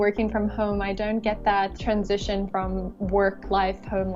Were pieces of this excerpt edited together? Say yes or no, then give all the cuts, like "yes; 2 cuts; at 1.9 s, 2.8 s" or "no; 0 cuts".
yes; 1 cut; at 1.8 s